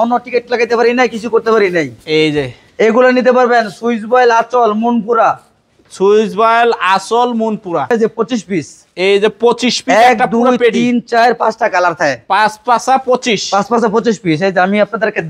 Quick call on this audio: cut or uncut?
cut